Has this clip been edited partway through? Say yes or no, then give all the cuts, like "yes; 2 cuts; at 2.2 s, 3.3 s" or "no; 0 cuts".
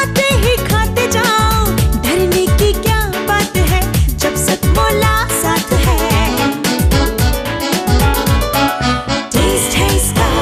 no; 0 cuts